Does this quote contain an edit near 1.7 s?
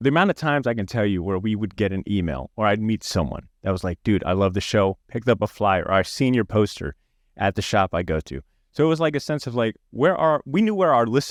no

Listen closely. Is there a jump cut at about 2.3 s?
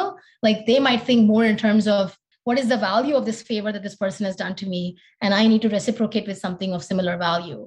yes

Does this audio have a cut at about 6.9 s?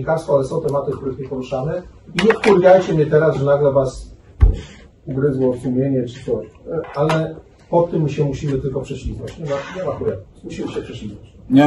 yes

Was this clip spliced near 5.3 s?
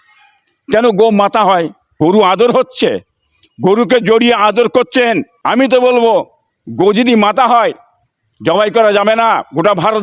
yes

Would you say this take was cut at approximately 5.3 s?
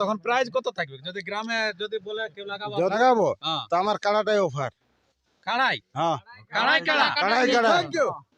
no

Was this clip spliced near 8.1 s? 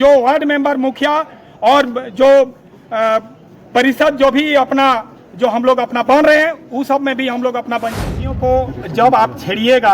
yes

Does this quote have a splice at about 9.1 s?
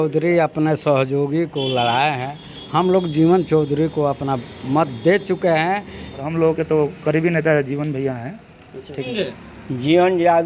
yes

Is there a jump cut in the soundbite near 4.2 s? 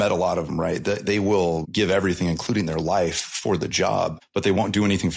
yes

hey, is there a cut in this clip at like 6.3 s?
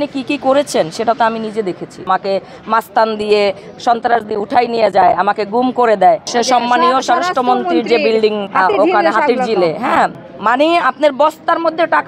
yes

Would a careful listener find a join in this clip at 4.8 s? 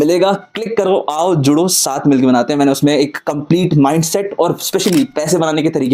no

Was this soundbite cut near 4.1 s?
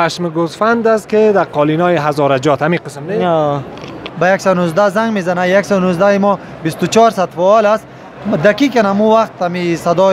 yes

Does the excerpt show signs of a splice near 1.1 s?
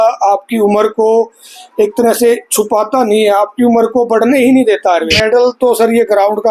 no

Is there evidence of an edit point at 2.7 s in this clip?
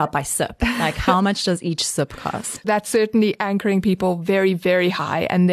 yes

